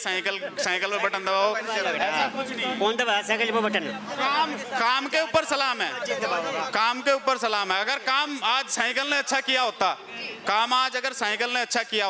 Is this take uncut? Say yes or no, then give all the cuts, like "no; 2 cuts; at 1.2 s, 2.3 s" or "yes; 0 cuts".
yes; 0 cuts